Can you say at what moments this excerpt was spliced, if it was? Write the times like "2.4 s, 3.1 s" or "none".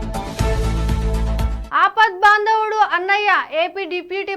1.6 s